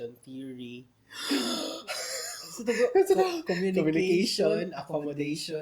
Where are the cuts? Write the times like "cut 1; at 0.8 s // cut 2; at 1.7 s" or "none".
none

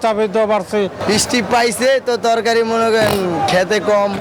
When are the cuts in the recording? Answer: cut 1; at 1.0 s

